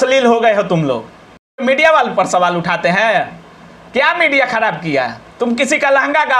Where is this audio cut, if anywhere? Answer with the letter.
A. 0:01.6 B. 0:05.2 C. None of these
A